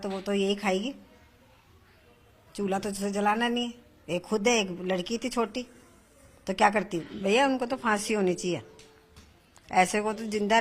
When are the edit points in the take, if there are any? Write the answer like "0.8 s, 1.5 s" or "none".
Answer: 7.1 s